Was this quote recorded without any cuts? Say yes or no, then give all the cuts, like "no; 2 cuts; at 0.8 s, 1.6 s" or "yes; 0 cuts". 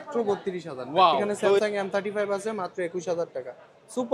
no; 1 cut; at 1.6 s